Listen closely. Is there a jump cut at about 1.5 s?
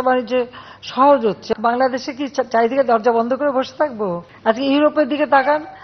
yes; 2 cuts; at 1.5 s, 4.3 s

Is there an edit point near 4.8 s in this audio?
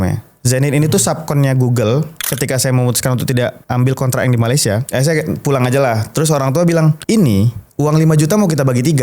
yes; 4 cuts; at 2.2 s, 3.6 s, 4.8 s, 7.0 s

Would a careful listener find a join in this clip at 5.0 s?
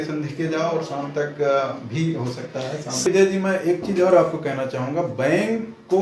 no; 1 cut; at 3.0 s

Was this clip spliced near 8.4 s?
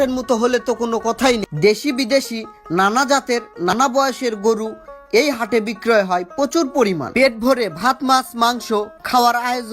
no; 2 cuts; at 1.5 s, 7.0 s

